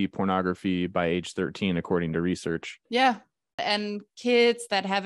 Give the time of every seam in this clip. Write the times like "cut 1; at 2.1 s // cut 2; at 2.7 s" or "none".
none

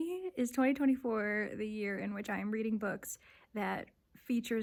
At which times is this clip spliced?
none

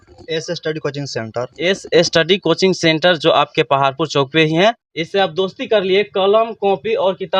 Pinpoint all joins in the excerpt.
cut 1; at 4.9 s

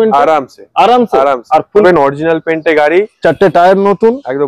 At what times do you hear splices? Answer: cut 1; at 1.8 s

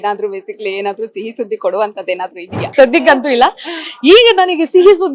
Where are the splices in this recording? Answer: cut 1; at 2.6 s

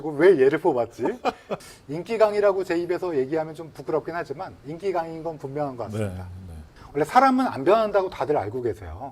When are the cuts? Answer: cut 1; at 1.5 s // cut 2; at 6.7 s

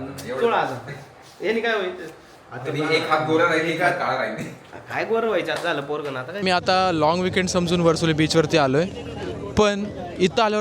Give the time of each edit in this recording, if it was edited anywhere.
cut 1; at 6.5 s

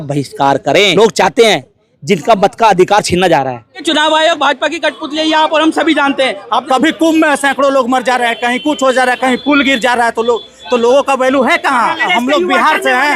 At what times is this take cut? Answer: cut 1; at 1.0 s // cut 2; at 3.8 s // cut 3; at 6.4 s // cut 4; at 12.1 s

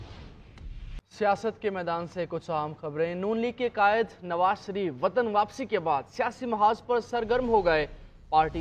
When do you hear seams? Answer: cut 1; at 0.9 s

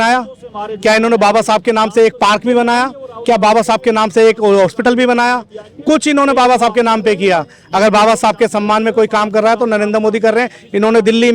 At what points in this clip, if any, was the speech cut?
none

